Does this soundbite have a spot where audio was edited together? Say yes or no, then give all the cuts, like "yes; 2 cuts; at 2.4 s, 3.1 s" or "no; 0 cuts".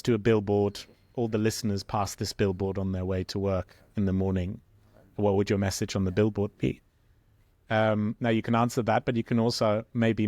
no; 0 cuts